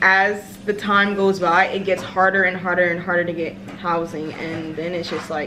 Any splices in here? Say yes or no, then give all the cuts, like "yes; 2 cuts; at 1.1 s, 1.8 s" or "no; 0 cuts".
no; 0 cuts